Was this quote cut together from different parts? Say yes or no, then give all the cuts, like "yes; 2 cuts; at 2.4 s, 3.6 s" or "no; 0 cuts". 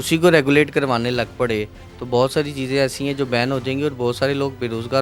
no; 0 cuts